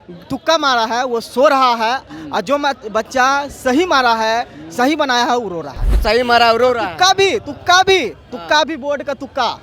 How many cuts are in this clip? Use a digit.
1